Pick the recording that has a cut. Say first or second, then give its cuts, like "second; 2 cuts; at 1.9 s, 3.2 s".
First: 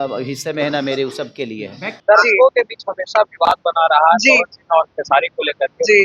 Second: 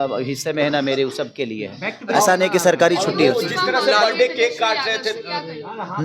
first; 1 cut; at 1.9 s